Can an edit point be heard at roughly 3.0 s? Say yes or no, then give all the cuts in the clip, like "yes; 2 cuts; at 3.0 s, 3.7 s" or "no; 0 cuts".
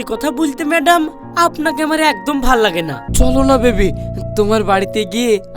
yes; 1 cut; at 3.0 s